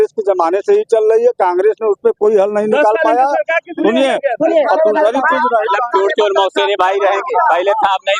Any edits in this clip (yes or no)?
no